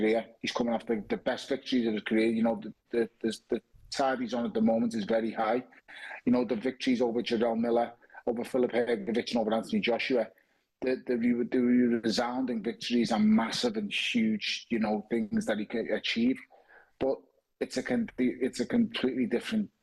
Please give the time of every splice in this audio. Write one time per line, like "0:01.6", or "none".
none